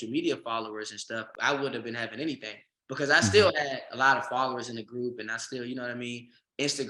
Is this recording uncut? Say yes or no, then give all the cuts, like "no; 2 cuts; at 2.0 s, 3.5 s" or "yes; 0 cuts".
no; 1 cut; at 1.3 s